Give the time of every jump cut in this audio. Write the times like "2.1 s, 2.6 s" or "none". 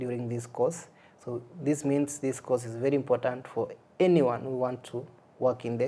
none